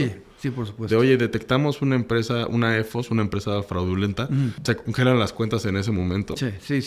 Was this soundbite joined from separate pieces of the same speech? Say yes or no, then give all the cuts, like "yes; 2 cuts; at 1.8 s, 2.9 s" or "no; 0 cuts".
yes; 1 cut; at 4.6 s